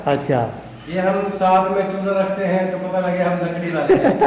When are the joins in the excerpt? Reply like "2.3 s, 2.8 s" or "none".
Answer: none